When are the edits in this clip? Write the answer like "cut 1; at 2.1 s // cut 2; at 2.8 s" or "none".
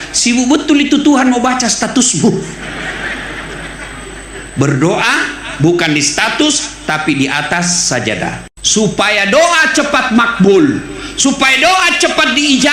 cut 1; at 8.5 s